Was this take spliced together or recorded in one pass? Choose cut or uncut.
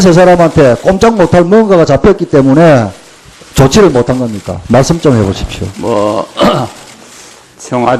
cut